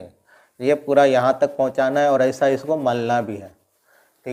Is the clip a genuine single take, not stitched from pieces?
yes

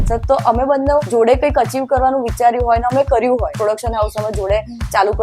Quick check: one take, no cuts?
no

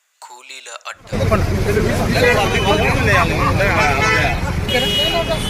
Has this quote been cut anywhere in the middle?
no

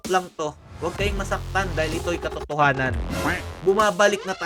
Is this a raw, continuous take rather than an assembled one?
yes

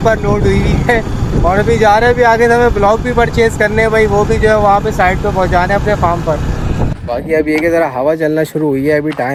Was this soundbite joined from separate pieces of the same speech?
no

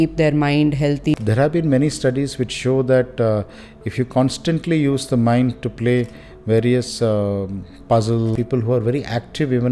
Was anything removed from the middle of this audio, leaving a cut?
yes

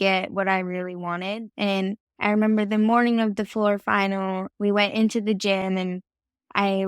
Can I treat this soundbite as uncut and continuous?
no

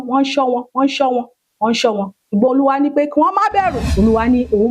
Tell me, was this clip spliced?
yes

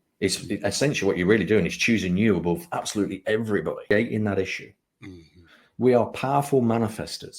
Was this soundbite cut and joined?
yes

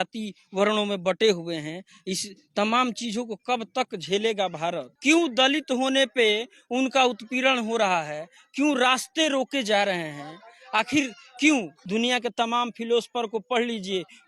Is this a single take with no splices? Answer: no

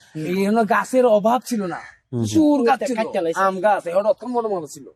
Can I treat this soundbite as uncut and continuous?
yes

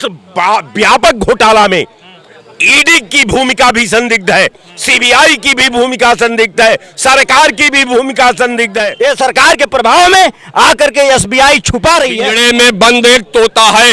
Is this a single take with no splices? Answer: no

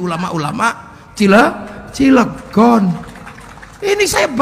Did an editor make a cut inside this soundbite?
no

